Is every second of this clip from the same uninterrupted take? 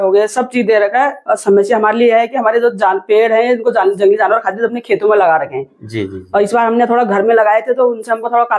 yes; 0 cuts

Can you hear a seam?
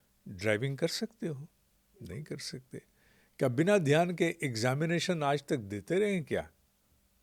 no; 0 cuts

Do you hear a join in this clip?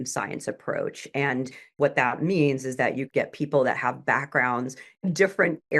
yes; 2 cuts; at 3.1 s, 5.0 s

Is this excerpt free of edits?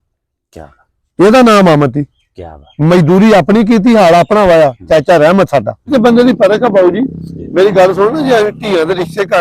no; 1 cut; at 5.9 s

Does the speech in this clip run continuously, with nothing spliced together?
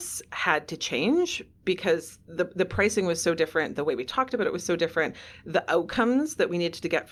yes; 0 cuts

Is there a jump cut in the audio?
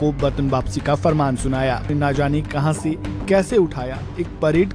yes; 1 cut; at 1.9 s

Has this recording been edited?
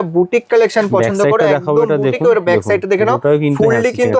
no; 0 cuts

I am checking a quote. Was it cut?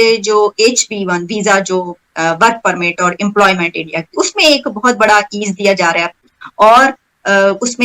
no; 0 cuts

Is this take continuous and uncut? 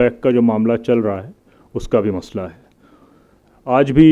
yes; 0 cuts

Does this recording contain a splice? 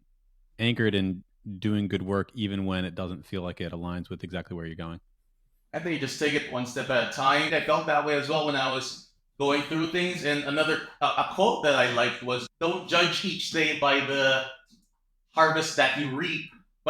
yes; 2 cuts; at 7.5 s, 12.4 s

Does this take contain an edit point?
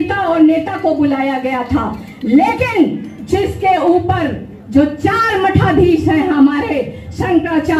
no; 0 cuts

